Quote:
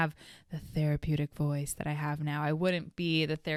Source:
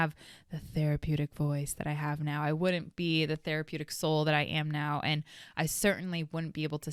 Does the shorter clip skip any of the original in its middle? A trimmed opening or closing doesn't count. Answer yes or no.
no